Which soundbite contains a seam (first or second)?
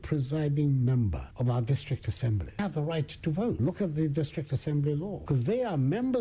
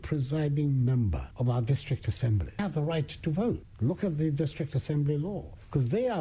first